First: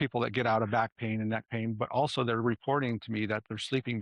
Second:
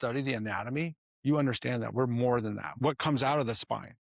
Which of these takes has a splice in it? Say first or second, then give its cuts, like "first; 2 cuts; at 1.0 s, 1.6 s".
second; 2 cuts; at 1.1 s, 2.7 s